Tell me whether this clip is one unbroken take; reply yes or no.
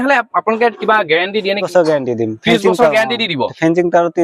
no